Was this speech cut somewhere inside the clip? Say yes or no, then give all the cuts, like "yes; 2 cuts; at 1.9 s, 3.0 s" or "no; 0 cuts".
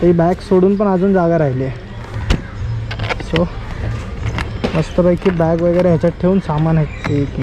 no; 0 cuts